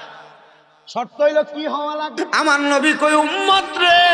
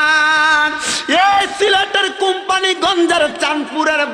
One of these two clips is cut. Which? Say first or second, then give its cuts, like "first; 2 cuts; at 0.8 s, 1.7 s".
first; 1 cut; at 2.1 s